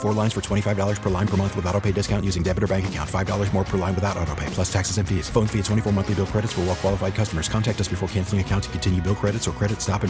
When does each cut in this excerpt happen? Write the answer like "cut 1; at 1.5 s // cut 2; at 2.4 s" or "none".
none